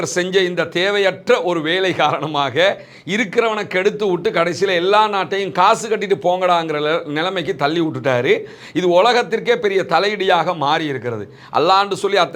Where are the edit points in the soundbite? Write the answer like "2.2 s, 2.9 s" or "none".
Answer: none